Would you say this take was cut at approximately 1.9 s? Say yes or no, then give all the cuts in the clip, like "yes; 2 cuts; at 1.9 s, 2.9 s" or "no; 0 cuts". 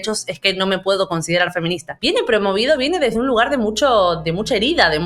yes; 1 cut; at 1.9 s